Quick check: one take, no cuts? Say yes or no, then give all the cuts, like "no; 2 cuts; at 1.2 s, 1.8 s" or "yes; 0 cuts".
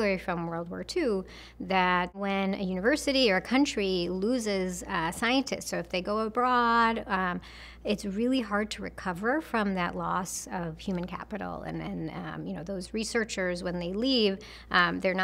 no; 1 cut; at 2.2 s